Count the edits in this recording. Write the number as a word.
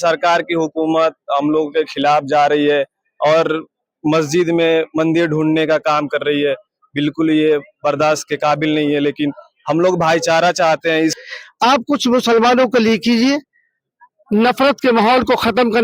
one